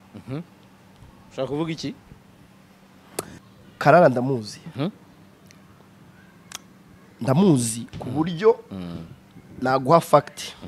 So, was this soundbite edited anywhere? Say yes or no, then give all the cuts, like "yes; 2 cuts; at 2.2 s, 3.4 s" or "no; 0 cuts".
yes; 1 cut; at 3.4 s